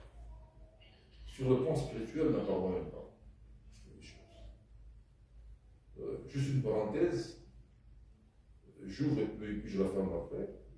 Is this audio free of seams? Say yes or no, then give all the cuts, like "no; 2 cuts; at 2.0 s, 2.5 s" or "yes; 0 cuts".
yes; 0 cuts